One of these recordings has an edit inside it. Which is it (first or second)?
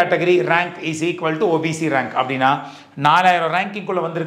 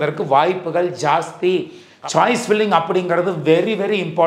second